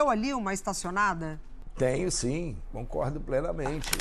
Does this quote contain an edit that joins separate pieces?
no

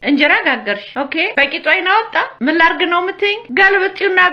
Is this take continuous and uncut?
no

